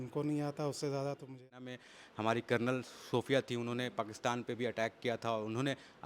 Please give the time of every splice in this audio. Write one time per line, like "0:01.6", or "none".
0:01.7

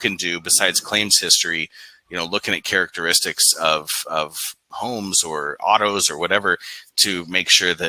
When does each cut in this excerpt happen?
none

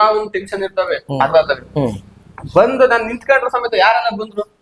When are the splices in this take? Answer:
0:01.3

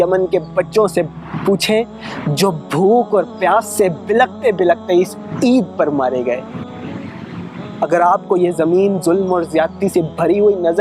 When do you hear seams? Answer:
none

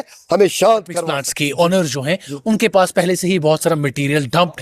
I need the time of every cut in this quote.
0:01.0

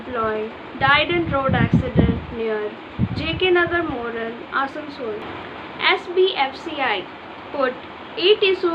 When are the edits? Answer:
0:05.3

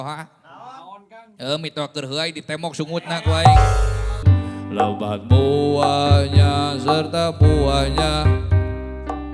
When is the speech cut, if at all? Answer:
0:04.2

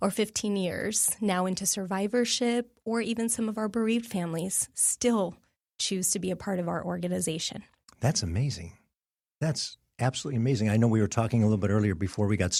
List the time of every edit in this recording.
none

